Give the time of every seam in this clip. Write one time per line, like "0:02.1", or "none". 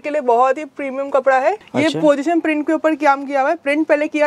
0:01.6